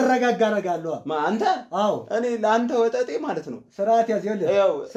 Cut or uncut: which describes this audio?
uncut